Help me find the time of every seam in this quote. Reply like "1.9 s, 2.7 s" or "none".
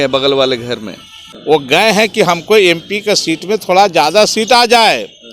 1.4 s